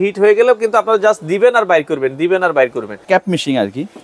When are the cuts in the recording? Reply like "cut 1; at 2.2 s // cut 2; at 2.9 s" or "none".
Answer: cut 1; at 3.0 s